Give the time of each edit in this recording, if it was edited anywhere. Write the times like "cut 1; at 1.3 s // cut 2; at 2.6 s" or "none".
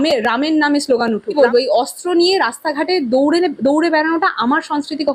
cut 1; at 1.3 s